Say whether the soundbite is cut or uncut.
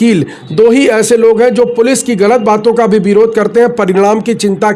uncut